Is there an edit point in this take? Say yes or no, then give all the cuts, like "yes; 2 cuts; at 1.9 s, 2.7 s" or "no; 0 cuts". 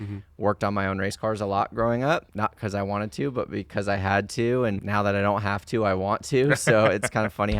yes; 2 cuts; at 2.3 s, 4.8 s